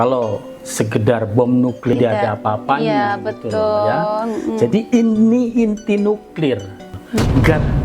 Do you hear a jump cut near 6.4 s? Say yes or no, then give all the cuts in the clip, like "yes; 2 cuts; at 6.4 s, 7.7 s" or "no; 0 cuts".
no; 1 cut; at 1.9 s